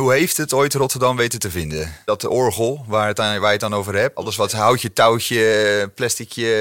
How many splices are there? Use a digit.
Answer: 2